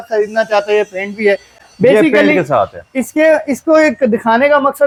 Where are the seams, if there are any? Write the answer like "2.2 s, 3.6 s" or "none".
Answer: none